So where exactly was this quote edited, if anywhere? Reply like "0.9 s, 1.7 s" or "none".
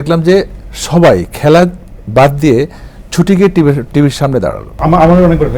4.7 s